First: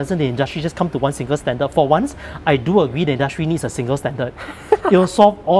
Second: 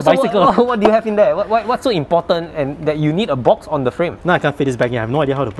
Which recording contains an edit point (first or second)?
second